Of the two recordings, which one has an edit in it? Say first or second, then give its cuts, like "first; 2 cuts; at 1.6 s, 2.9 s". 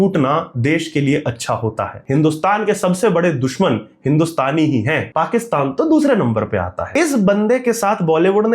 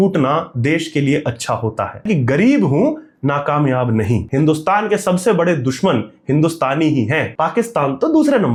first; 2 cuts; at 2.0 s, 6.8 s